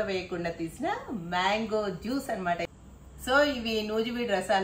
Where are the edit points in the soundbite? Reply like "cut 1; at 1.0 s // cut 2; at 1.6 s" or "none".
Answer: cut 1; at 2.7 s